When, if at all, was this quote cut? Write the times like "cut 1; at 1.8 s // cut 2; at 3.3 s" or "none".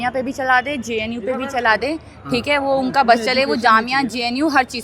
none